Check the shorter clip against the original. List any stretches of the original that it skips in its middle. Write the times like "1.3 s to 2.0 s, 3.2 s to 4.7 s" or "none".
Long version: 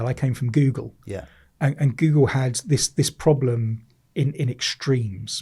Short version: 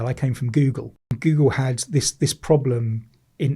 1.2 s to 1.9 s